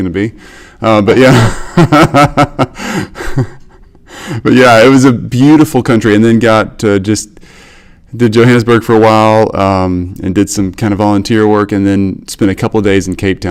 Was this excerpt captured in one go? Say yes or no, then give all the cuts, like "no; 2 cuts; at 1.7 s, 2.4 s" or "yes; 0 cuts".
yes; 0 cuts